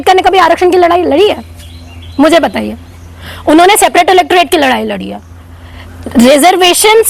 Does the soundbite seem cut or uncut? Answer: uncut